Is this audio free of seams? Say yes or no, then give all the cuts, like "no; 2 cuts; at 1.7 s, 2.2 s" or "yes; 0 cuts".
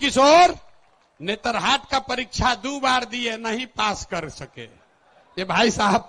yes; 0 cuts